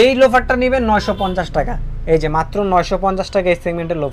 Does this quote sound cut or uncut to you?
uncut